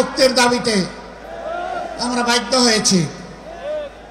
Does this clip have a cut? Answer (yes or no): no